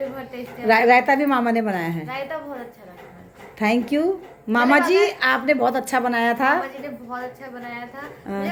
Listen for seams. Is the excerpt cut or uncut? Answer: uncut